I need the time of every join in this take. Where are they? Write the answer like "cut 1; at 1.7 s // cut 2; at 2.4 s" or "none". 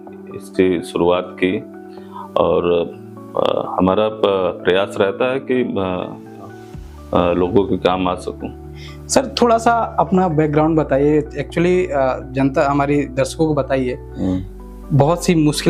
none